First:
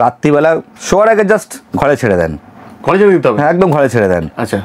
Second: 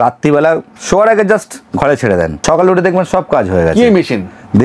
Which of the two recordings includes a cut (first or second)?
second